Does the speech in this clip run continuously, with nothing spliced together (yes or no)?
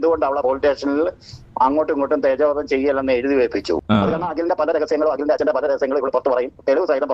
yes